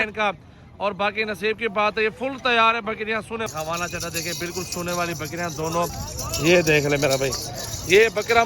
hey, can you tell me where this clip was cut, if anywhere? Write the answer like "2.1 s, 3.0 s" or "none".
3.5 s, 5.9 s